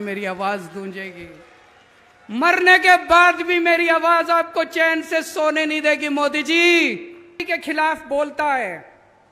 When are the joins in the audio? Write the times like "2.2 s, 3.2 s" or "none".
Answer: 7.4 s